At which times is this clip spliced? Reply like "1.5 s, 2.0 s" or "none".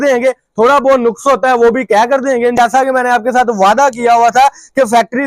2.6 s